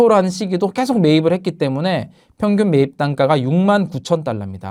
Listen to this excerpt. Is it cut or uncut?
uncut